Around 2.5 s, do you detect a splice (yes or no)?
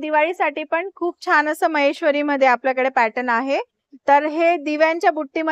no